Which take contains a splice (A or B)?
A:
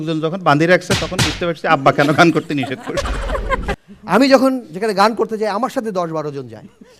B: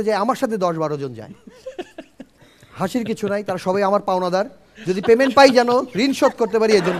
A